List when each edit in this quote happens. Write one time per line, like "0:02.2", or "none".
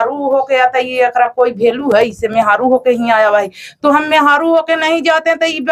none